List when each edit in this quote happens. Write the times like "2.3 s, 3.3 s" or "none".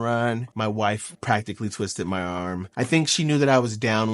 1.1 s, 2.7 s

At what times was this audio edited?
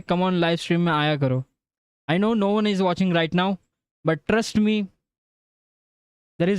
none

